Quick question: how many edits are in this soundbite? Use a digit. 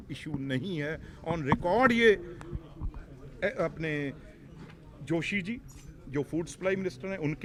0